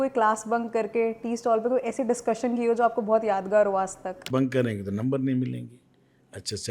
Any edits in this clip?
yes; 1 cut; at 4.2 s

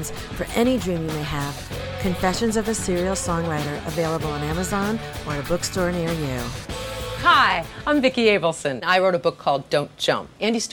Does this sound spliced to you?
yes; 1 cut; at 7.1 s

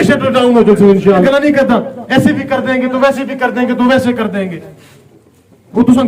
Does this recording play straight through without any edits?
no; 1 cut; at 1.2 s

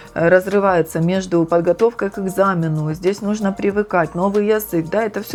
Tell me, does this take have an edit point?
no; 0 cuts

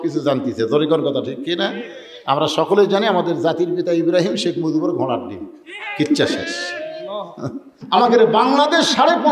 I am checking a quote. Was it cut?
yes; 1 cut; at 7.8 s

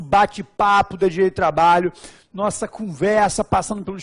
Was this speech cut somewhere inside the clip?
no; 0 cuts

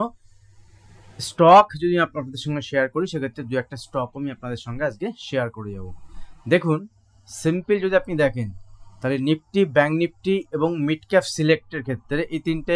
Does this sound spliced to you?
no; 0 cuts

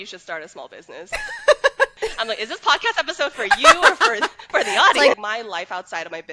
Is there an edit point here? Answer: yes; 2 cuts; at 1.9 s, 5.2 s

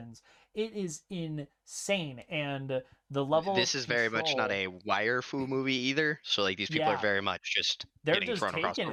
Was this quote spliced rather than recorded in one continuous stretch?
no; 0 cuts

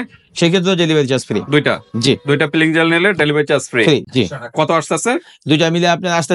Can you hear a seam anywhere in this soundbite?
no; 0 cuts

